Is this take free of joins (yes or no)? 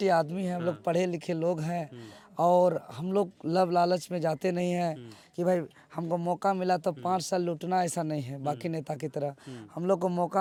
yes